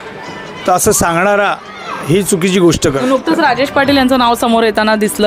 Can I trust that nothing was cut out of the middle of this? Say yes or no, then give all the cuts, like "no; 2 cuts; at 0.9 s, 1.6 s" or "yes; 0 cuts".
no; 1 cut; at 3.0 s